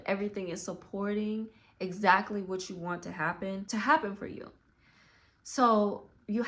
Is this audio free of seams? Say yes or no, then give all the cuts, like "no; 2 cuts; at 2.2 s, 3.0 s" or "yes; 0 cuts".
no; 1 cut; at 3.6 s